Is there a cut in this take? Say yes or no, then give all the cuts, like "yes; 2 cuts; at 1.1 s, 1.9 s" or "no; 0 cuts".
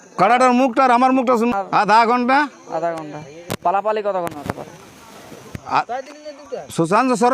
yes; 1 cut; at 1.5 s